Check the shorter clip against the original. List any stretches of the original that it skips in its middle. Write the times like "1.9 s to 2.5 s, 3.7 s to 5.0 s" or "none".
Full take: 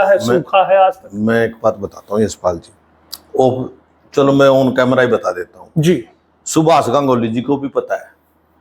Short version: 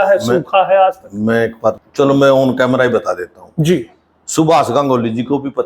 1.8 s to 4.0 s